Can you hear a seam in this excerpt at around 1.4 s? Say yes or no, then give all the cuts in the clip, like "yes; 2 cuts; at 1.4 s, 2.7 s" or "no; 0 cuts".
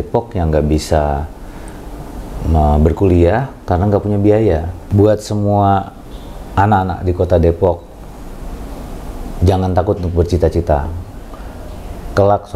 no; 1 cut; at 4.8 s